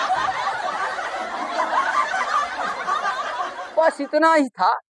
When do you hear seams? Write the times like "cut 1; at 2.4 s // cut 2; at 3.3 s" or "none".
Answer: none